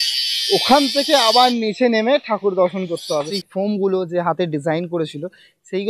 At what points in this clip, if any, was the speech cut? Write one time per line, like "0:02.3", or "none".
0:03.3